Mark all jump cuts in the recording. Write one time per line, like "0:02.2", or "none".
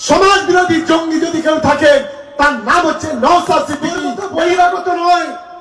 0:04.1